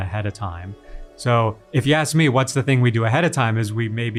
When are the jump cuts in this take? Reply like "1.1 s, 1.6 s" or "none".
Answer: none